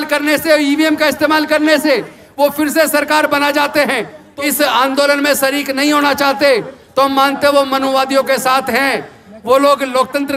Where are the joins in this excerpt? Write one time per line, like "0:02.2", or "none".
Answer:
0:04.2